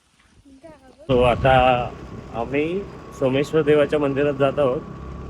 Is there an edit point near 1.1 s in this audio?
yes; 1 cut; at 1.1 s

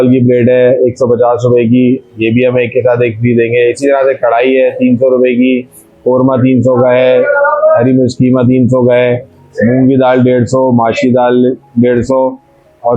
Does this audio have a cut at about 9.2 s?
no; 0 cuts

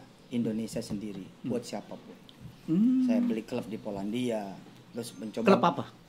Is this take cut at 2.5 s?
yes; 1 cut; at 2.5 s

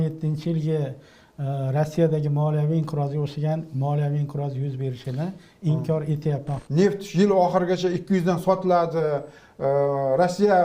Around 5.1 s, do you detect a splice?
no; 1 cut; at 6.6 s

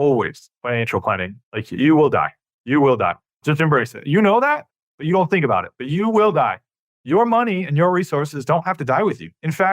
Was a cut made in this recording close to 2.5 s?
yes; 2 cuts; at 2.5 s, 3.4 s

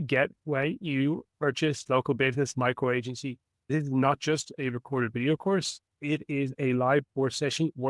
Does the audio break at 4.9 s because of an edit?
no; 3 cuts; at 1.8 s, 3.6 s, 6.5 s

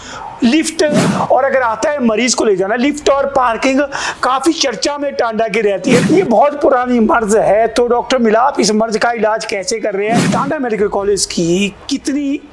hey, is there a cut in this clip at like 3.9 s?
no; 3 cuts; at 1.1 s, 6.0 s, 10.2 s

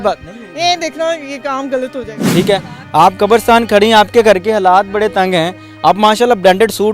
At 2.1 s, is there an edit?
yes; 1 cut; at 2.1 s

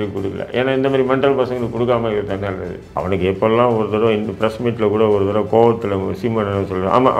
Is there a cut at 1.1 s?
no; 1 cut; at 2.9 s

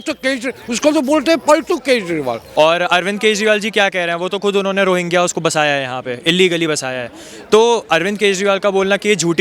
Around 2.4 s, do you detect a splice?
yes; 1 cut; at 2.4 s

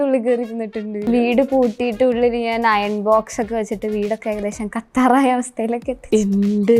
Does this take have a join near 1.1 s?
yes; 1 cut; at 1.1 s

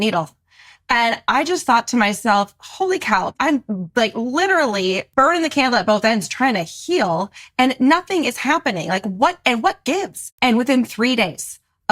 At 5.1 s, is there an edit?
yes; 3 cuts; at 3.3 s, 5.1 s, 10.2 s

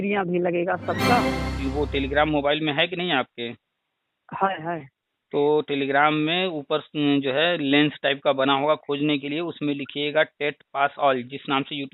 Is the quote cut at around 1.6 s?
yes; 1 cut; at 1.6 s

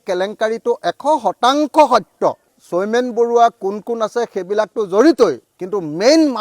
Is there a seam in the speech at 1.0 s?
no; 1 cut; at 2.5 s

